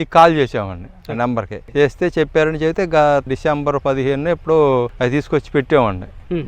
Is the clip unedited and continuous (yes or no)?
no